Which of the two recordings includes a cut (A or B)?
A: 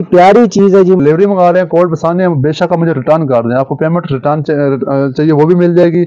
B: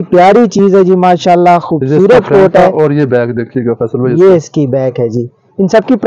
A